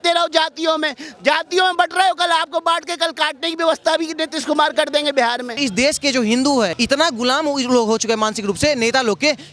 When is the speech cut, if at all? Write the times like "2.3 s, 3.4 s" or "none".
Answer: 5.6 s, 6.7 s